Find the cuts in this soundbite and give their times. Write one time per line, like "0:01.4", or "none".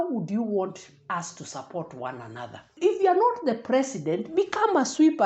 0:02.8